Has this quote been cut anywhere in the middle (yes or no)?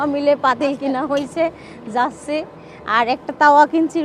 no